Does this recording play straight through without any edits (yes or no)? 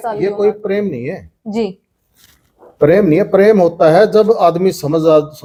yes